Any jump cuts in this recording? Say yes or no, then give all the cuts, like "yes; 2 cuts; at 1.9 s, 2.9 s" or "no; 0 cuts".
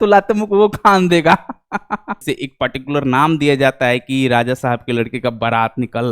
yes; 1 cut; at 2.2 s